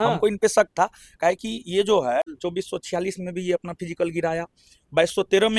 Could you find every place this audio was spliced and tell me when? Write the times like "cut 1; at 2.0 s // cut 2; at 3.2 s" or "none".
cut 1; at 2.4 s